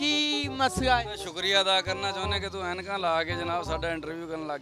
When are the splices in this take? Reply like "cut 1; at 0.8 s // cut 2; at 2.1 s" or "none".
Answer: none